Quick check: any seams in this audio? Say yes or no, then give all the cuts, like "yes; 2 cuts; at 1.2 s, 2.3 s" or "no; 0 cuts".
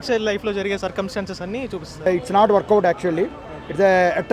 yes; 1 cut; at 2.1 s